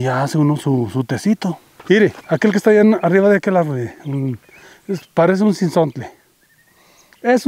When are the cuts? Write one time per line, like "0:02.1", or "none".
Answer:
0:01.7